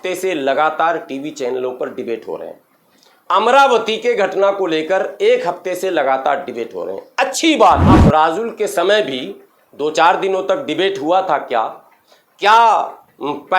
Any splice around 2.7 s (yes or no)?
no